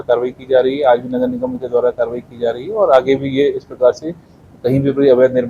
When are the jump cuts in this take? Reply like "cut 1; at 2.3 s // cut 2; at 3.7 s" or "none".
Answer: none